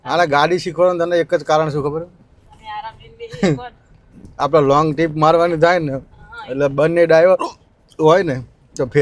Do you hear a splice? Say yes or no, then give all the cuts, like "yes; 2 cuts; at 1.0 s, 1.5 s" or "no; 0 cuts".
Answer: no; 0 cuts